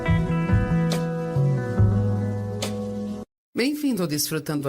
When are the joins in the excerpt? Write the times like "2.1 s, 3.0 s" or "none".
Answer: 3.4 s